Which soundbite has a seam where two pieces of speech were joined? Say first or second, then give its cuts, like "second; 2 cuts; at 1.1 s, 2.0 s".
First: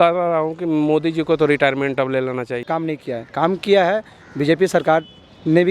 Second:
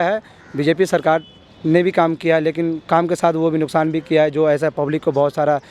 first; 1 cut; at 2.6 s